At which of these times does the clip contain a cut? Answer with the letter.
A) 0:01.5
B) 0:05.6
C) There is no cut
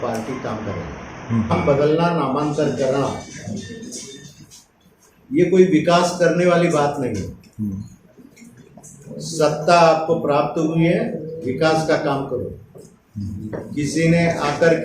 A